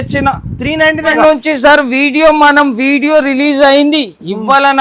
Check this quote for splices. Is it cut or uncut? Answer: cut